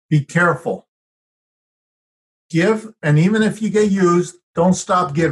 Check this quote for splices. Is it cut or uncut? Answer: uncut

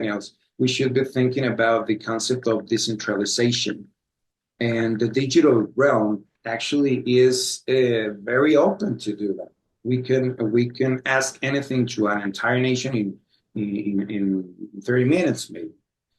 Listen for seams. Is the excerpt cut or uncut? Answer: uncut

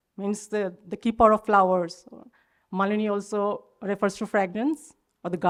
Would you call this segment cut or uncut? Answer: uncut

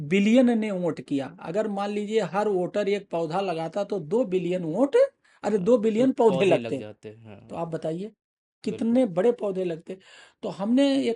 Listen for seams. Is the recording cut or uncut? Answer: uncut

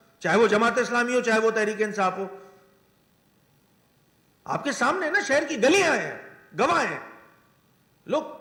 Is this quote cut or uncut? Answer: uncut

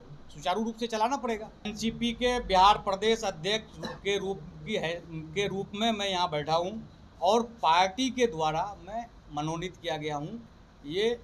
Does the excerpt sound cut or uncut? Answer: cut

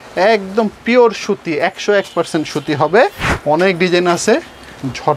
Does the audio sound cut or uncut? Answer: cut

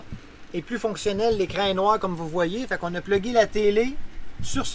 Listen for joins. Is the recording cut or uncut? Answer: uncut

